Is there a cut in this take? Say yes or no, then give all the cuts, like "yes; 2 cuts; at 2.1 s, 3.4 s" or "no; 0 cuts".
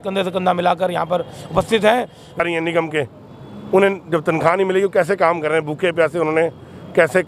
yes; 1 cut; at 2.4 s